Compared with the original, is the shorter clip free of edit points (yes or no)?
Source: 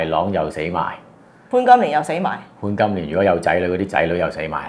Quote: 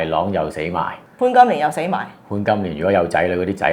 no